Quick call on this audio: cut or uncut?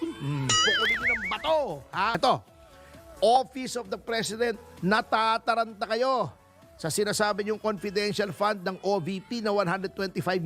cut